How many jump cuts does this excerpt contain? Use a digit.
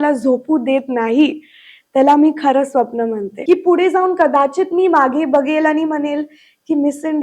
1